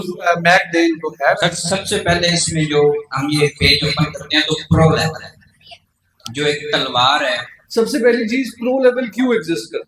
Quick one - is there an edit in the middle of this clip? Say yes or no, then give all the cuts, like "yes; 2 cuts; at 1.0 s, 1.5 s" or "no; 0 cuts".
yes; 2 cuts; at 1.4 s, 7.5 s